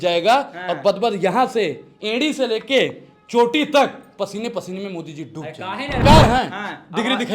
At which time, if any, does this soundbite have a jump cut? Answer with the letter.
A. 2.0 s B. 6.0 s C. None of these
B